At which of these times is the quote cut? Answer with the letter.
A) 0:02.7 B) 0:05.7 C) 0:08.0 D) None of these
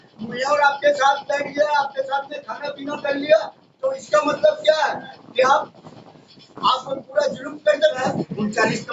C